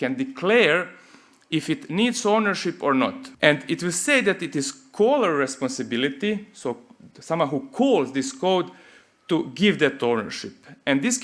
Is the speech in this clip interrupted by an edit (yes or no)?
yes